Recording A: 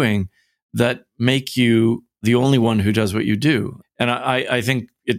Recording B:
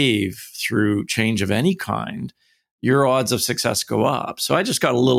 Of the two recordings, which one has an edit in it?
A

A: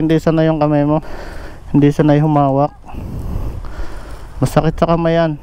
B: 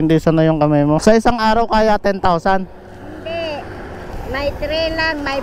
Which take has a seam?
B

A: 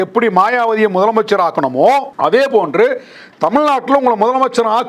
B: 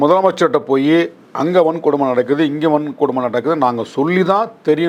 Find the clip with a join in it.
A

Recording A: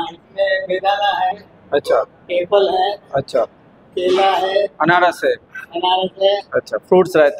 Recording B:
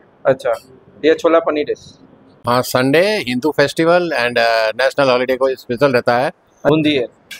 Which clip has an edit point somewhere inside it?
B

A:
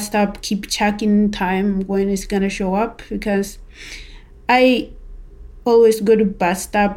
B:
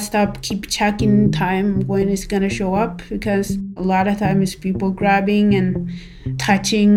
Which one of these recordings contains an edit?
B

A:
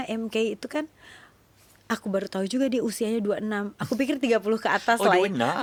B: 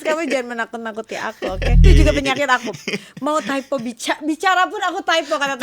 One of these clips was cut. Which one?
B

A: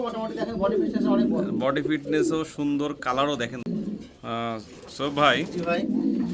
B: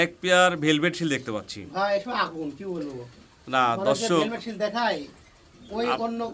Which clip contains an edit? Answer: A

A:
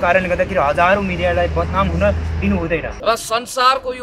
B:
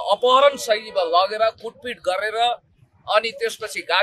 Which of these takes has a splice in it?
A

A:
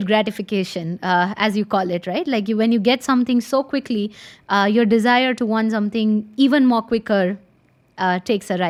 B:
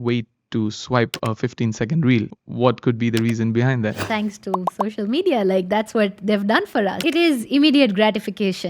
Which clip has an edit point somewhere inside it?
B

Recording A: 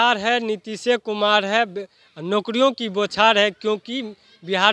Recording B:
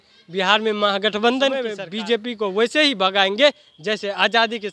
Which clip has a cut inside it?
B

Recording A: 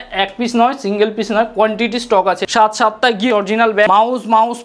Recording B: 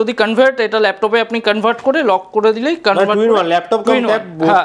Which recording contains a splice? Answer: A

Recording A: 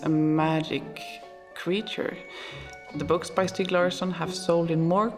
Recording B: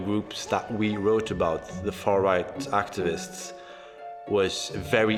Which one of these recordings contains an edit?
A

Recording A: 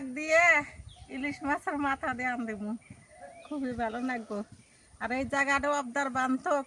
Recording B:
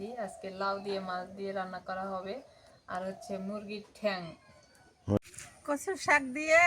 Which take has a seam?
B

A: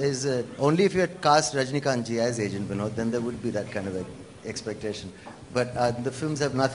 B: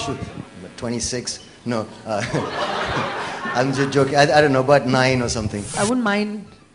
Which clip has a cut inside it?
B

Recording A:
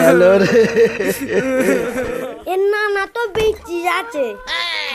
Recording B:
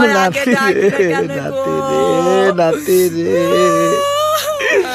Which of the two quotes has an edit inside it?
A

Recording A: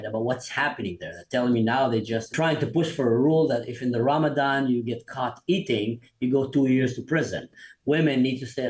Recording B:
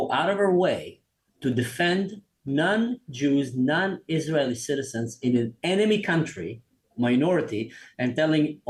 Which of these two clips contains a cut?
A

